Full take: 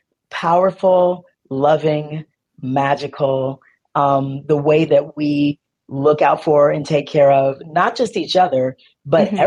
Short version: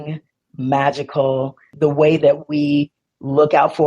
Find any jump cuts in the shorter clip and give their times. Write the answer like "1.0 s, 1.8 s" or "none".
1.7 s